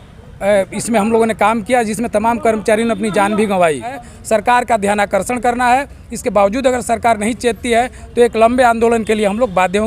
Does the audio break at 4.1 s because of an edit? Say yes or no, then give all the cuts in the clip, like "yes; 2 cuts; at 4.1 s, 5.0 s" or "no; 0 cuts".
yes; 1 cut; at 4.1 s